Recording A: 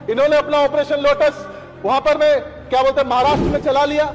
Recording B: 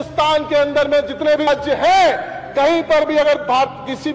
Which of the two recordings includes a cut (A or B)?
B